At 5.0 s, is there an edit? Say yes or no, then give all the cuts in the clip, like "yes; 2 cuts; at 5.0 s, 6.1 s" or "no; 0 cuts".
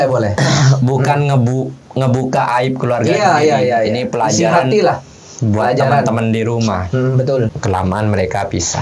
no; 1 cut; at 7.6 s